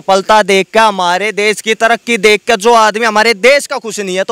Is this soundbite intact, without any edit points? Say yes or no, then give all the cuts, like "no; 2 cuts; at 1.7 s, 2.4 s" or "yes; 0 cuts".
yes; 0 cuts